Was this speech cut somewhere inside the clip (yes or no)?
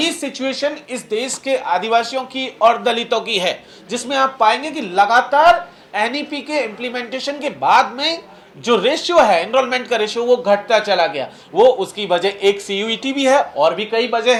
no